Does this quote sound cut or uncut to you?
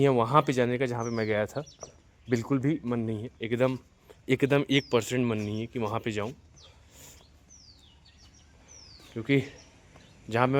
uncut